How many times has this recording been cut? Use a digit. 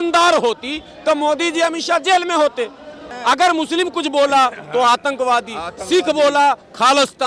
1